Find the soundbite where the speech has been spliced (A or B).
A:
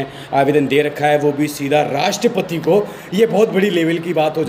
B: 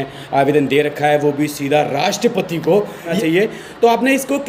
B